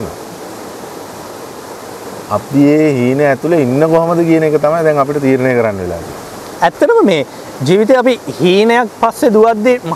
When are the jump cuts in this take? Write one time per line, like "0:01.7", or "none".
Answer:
none